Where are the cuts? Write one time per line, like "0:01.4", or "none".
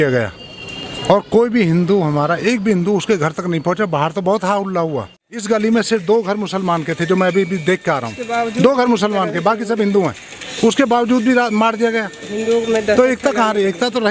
0:05.2